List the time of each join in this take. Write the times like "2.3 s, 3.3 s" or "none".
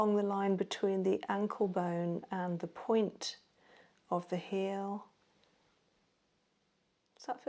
none